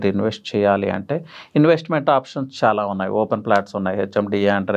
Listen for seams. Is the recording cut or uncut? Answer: uncut